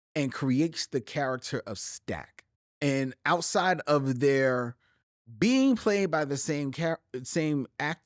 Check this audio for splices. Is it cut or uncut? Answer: cut